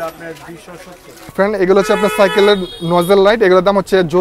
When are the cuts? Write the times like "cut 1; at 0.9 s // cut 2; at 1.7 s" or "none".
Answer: cut 1; at 1.3 s

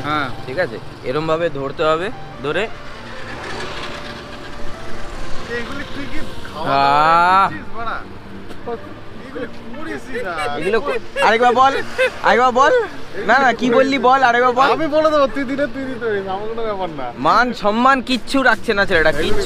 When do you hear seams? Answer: none

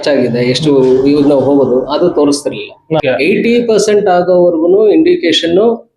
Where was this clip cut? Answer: cut 1; at 3.0 s

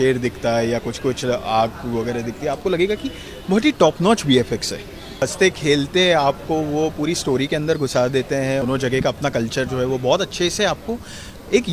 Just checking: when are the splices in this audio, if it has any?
cut 1; at 5.2 s // cut 2; at 8.6 s

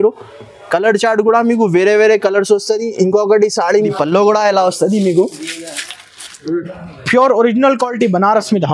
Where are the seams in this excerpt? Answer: cut 1; at 3.7 s

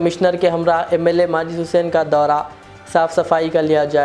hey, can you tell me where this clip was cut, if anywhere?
none

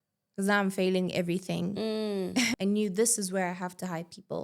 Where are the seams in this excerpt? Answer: cut 1; at 2.5 s

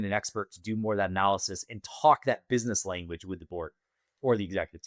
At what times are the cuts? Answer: none

